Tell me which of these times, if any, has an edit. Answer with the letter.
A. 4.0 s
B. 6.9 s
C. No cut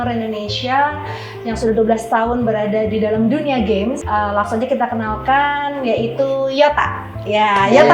A